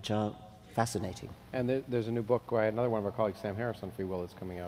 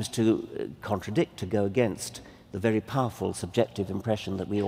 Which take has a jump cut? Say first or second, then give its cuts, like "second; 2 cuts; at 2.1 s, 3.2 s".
first; 1 cut; at 1.2 s